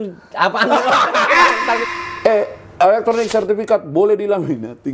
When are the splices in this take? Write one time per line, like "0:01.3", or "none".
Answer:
0:01.8